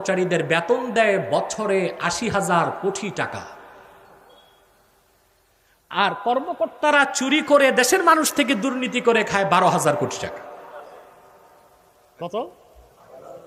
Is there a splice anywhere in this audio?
no; 0 cuts

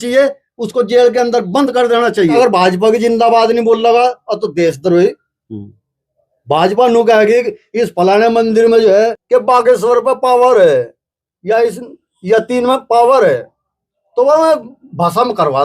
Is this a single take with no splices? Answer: no; 2 cuts; at 2.4 s, 9.2 s

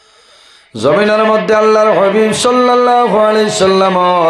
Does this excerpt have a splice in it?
no; 0 cuts

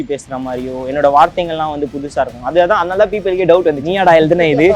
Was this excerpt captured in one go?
no; 1 cut; at 3.8 s

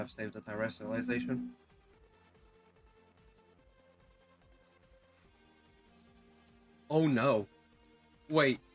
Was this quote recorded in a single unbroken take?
no; 1 cut; at 2.1 s

